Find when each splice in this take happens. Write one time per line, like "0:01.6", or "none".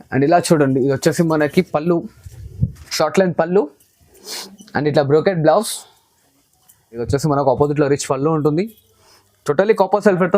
0:07.0